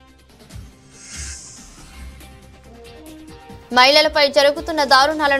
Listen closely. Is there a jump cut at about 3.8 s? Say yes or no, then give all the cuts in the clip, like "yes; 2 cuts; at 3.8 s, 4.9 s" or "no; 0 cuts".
no; 1 cut; at 1.2 s